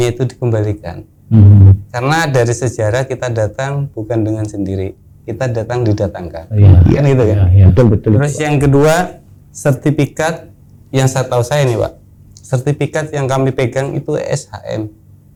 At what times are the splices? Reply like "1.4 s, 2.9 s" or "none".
none